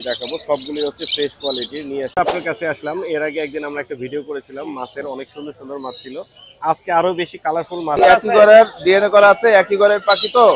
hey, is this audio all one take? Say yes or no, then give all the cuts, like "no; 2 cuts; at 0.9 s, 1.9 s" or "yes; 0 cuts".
no; 2 cuts; at 2.2 s, 8.0 s